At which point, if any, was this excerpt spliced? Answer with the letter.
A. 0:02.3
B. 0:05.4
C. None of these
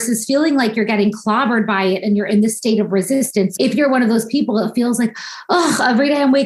C